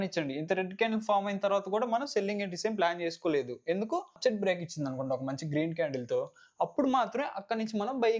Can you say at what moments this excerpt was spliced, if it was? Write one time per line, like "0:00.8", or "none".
0:04.2